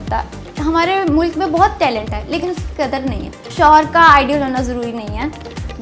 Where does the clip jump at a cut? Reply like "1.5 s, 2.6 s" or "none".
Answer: 3.5 s